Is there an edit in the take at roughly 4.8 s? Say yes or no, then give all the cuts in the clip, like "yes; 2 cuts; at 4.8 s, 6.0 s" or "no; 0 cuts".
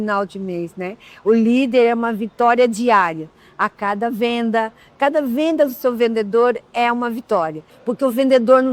no; 1 cut; at 7.7 s